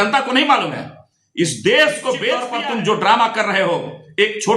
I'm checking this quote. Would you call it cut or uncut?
cut